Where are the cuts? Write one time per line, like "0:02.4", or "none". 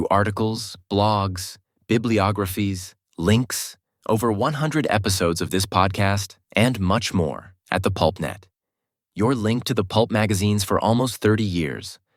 none